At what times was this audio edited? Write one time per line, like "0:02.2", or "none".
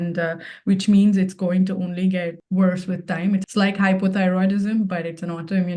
0:02.4
0:03.5